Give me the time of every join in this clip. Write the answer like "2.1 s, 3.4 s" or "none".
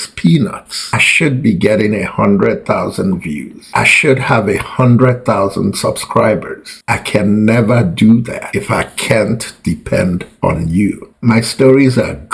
11.1 s